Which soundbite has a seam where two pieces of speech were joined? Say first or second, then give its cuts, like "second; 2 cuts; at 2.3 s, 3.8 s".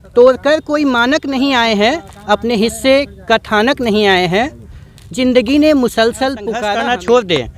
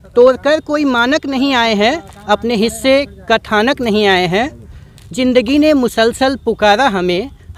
first; 1 cut; at 6.6 s